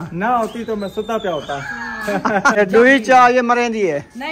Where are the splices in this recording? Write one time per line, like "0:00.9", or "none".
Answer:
0:02.6